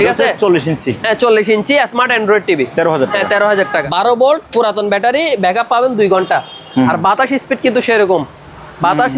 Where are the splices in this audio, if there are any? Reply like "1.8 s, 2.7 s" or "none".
3.8 s